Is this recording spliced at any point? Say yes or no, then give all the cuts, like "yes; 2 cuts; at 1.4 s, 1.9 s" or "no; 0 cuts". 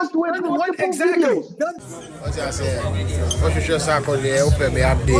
yes; 1 cut; at 1.8 s